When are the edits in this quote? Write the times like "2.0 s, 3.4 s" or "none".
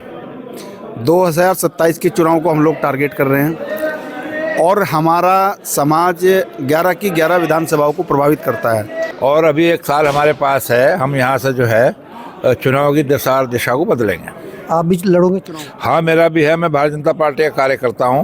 9.0 s